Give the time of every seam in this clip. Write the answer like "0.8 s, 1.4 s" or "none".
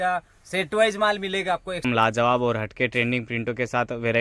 1.8 s